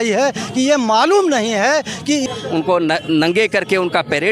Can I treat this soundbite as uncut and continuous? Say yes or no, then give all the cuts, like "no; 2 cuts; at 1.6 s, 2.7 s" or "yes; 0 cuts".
no; 1 cut; at 2.3 s